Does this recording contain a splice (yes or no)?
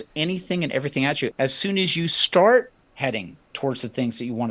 yes